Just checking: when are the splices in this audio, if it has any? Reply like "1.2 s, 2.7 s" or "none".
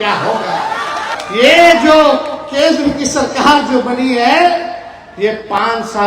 1.1 s